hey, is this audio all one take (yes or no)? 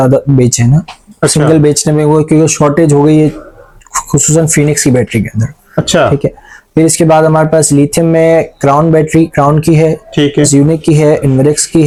yes